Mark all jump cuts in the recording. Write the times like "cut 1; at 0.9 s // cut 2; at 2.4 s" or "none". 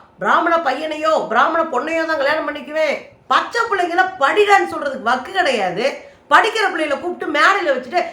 cut 1; at 3.1 s